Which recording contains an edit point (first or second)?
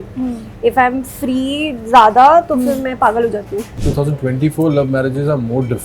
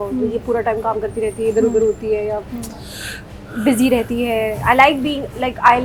first